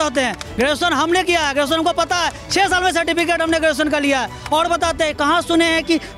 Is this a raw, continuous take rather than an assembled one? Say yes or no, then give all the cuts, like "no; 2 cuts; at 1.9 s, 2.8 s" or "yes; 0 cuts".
yes; 0 cuts